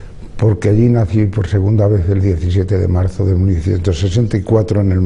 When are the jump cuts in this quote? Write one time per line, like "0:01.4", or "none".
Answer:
0:02.9